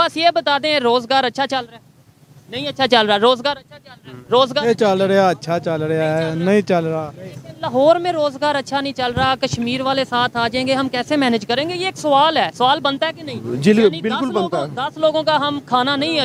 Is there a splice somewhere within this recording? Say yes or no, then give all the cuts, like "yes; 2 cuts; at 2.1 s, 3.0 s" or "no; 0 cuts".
no; 0 cuts